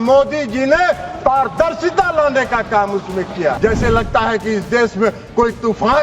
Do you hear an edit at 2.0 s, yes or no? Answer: no